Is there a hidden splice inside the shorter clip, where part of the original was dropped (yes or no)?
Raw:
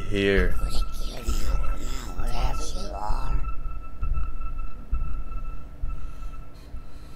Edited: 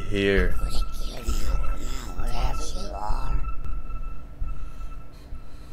yes